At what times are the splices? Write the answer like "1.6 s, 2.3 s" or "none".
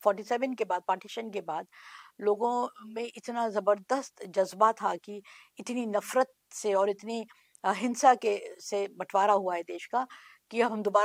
none